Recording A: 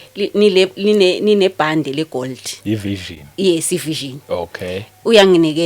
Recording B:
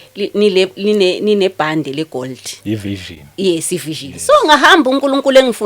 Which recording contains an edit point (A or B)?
B